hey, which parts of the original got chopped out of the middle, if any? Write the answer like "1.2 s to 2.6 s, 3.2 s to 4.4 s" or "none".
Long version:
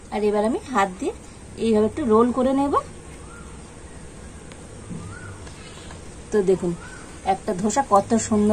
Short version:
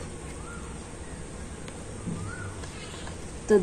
none